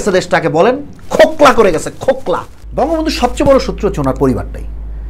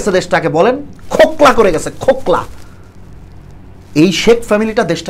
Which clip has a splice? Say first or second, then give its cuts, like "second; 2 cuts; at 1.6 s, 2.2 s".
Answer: first; 1 cut; at 2.6 s